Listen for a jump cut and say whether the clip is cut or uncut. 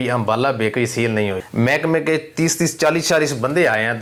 uncut